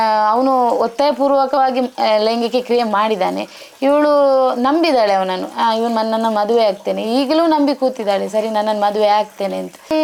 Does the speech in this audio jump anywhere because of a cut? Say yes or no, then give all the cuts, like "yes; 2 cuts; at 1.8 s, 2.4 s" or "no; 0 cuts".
no; 0 cuts